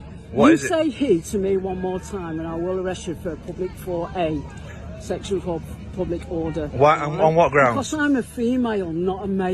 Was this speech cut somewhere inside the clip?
no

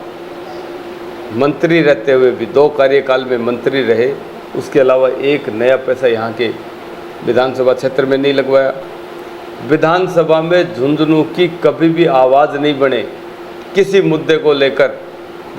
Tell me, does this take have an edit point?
no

